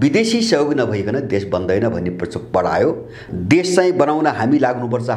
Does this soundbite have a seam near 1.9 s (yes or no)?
no